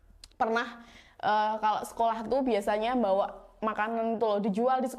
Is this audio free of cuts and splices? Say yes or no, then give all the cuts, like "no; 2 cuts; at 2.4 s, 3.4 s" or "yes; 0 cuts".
yes; 0 cuts